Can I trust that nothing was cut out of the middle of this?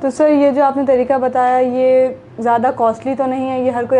yes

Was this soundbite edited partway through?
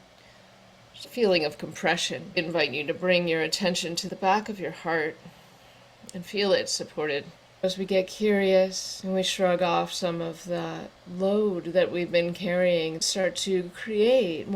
yes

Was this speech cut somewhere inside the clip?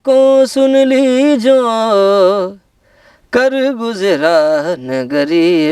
no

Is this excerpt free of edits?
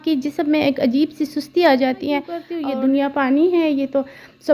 no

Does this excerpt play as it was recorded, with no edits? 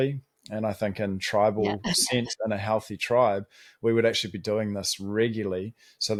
yes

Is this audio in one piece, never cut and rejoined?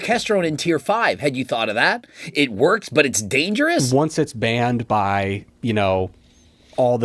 no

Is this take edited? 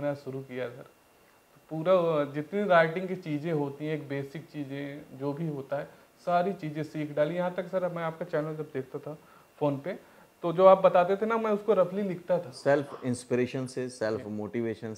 yes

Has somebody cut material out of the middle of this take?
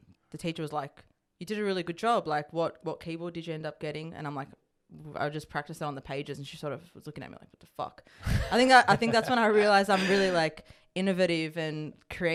no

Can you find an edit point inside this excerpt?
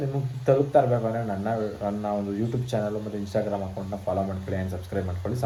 no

